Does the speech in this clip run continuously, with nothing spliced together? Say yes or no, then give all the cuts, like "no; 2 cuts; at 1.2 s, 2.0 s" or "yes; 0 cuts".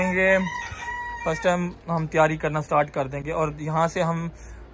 yes; 0 cuts